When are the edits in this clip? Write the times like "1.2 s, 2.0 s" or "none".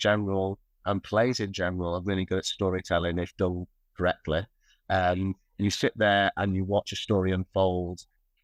none